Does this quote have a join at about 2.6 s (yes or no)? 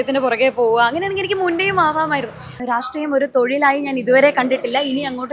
yes